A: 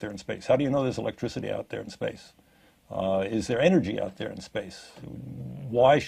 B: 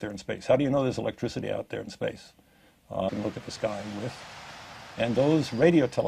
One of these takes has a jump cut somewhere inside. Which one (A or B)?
A